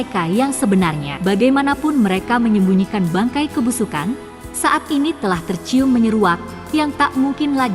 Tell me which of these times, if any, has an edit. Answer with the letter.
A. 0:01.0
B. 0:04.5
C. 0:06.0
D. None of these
A